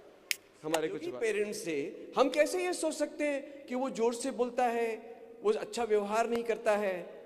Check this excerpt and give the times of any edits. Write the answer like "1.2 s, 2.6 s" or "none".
1.1 s